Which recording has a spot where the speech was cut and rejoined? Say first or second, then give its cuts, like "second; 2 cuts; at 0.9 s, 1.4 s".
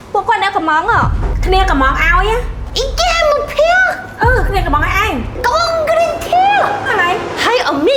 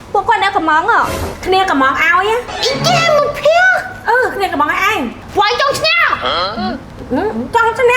second; 2 cuts; at 2.5 s, 5.2 s